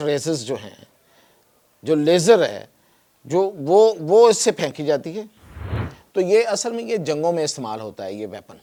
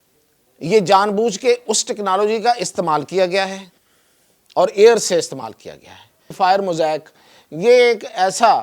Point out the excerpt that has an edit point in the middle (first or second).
second